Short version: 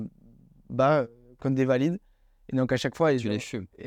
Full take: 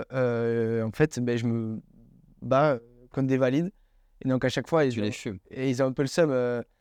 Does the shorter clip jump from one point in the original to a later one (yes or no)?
no